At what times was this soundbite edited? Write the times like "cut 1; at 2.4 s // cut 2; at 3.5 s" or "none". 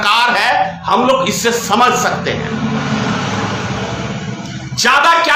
none

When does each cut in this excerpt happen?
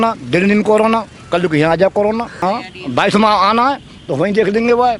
cut 1; at 2.4 s

